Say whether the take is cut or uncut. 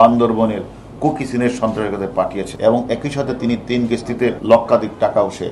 cut